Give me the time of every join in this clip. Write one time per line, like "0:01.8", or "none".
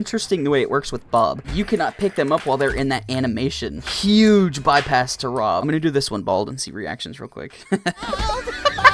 0:01.4
0:03.9
0:05.6